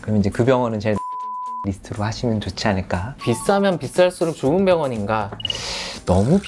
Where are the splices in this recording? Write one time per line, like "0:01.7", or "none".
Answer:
0:03.1
0:05.4